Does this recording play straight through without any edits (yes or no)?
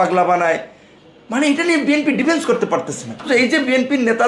no